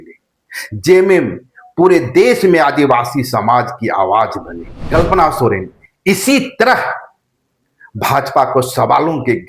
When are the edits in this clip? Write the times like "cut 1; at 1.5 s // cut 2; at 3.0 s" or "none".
cut 1; at 4.8 s